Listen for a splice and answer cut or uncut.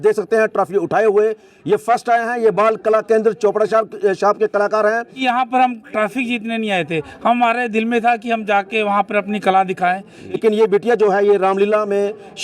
cut